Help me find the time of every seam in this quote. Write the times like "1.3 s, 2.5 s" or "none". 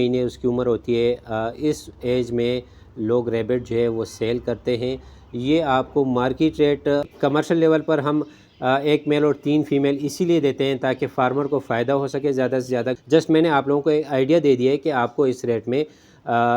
7.1 s, 13.0 s